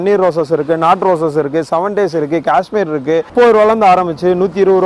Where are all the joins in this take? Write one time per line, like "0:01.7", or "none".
0:03.3